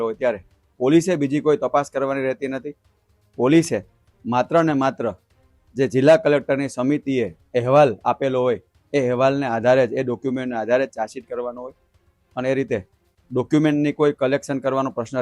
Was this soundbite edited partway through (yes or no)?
no